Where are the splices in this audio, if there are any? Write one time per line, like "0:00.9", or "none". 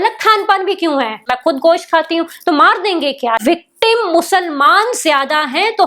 0:01.3
0:03.4